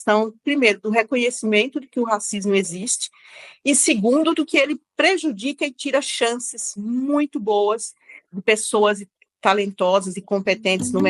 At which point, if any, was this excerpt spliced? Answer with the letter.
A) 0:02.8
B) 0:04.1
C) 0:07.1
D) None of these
D